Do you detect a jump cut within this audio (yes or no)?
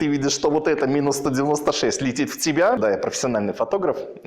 yes